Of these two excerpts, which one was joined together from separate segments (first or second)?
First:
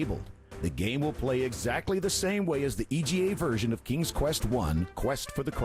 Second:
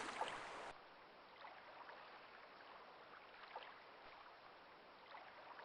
second